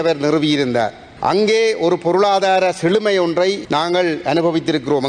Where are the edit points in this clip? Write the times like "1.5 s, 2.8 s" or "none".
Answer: 1.0 s, 3.6 s